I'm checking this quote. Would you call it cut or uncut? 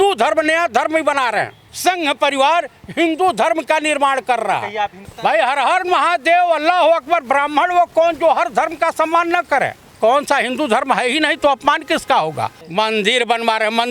cut